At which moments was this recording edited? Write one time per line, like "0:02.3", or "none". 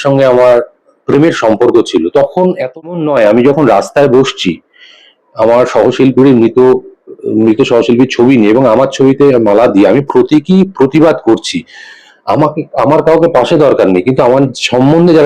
0:02.9